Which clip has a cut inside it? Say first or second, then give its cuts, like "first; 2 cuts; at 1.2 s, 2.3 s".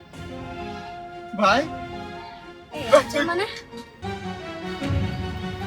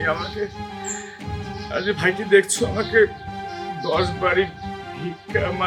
first; 1 cut; at 4.2 s